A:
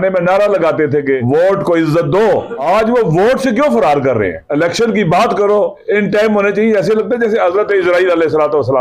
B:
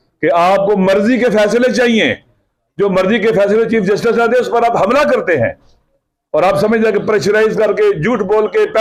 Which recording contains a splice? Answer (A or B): A